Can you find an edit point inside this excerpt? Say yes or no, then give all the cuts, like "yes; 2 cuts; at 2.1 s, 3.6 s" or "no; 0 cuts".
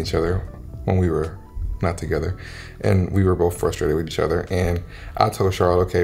no; 0 cuts